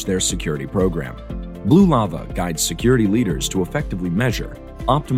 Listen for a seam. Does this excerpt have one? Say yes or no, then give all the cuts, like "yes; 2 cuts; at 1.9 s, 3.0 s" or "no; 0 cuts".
no; 0 cuts